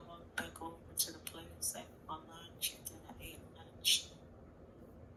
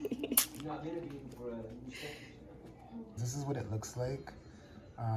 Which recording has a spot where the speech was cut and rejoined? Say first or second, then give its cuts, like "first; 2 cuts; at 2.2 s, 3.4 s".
second; 1 cut; at 3.2 s